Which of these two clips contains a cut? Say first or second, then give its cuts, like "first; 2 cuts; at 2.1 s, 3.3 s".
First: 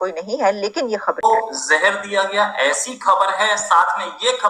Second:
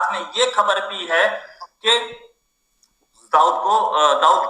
first; 1 cut; at 1.2 s